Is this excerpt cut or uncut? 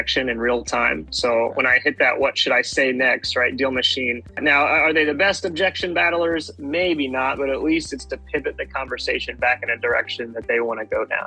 uncut